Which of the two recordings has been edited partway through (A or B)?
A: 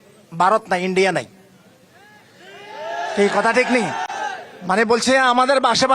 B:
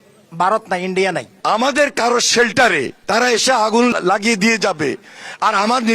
B